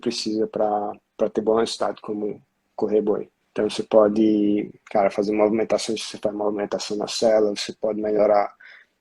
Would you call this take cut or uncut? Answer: cut